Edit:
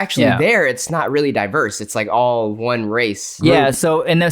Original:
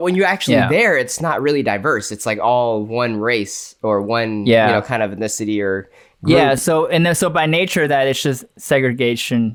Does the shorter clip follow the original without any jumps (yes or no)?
no